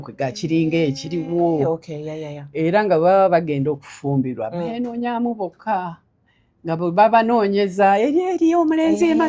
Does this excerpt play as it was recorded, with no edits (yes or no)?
yes